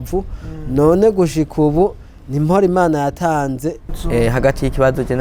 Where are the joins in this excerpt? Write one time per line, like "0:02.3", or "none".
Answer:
0:03.9